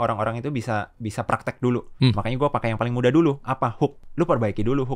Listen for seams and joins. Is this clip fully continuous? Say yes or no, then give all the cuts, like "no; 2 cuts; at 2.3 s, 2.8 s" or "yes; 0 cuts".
no; 2 cuts; at 1.9 s, 4.0 s